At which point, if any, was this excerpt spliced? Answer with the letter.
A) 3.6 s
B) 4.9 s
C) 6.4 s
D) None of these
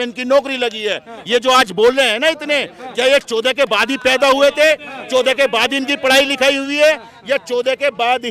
D